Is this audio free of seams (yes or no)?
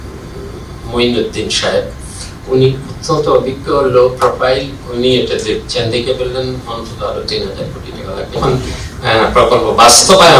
no